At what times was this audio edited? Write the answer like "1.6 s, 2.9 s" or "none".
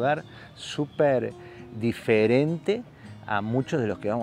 none